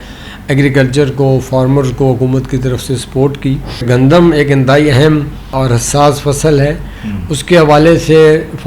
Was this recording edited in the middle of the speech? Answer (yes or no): yes